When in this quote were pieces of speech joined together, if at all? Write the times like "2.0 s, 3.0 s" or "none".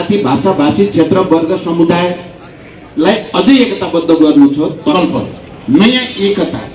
4.9 s